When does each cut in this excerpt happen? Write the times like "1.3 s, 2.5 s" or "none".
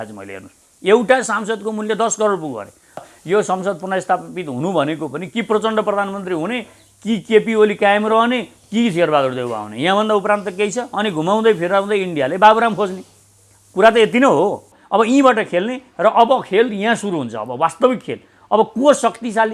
3.0 s, 14.7 s